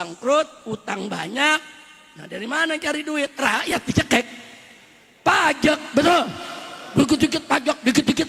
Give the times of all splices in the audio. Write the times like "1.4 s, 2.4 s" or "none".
none